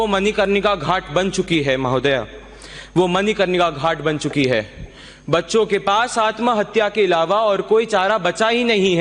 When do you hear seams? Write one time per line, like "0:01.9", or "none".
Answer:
none